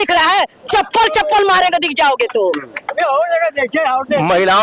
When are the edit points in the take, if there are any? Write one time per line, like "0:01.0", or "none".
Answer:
none